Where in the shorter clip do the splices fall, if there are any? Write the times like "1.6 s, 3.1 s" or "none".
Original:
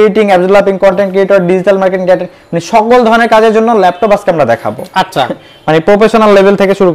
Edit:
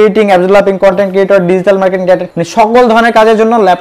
2.3 s